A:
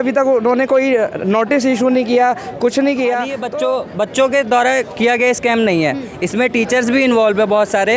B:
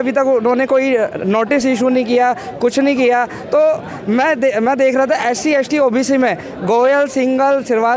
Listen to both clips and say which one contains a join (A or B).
A